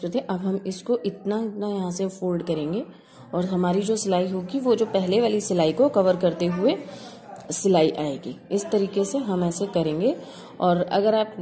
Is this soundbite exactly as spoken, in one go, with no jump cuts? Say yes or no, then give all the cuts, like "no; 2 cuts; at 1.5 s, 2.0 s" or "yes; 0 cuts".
no; 1 cut; at 3.1 s